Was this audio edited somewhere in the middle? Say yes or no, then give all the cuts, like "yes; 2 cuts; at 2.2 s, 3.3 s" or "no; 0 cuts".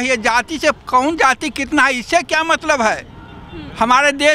no; 0 cuts